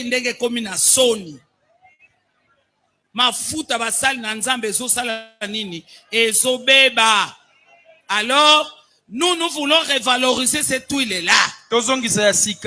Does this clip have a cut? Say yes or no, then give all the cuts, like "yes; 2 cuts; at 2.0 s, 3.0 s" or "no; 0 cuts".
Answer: no; 0 cuts